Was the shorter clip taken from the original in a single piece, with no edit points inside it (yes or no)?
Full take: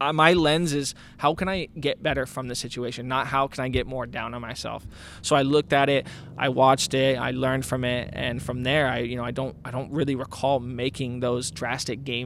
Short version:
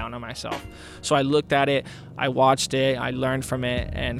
yes